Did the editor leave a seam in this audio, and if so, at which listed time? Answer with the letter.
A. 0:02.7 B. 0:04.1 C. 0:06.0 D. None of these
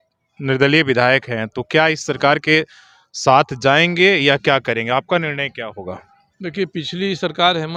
D